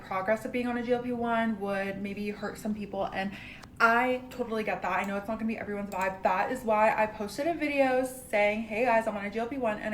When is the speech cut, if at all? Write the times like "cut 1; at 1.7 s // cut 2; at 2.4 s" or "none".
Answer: cut 1; at 1.2 s

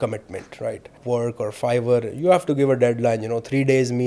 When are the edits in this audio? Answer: cut 1; at 1.0 s

